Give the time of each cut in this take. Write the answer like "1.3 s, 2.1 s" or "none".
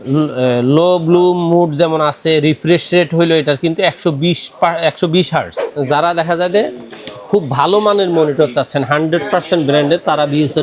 5.7 s